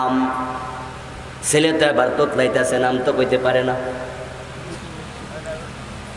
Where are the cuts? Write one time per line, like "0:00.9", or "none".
0:04.7